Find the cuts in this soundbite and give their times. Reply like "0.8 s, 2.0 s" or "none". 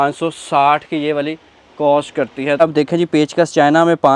2.6 s